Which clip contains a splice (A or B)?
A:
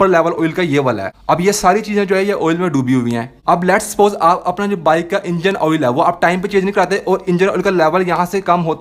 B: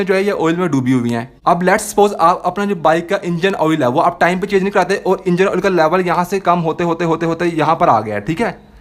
A